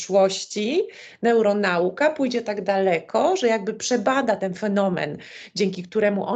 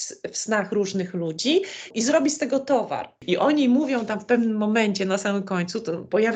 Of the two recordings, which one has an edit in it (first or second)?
second